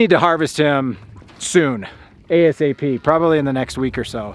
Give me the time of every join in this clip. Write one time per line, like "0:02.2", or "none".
none